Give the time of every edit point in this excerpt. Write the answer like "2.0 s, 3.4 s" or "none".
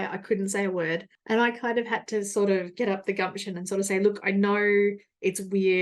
1.1 s